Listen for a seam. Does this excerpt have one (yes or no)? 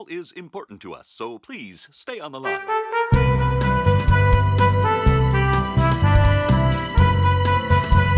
yes